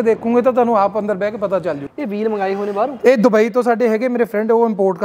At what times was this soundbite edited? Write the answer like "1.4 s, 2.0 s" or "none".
1.8 s